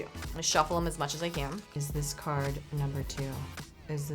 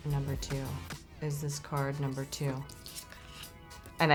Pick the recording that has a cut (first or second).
first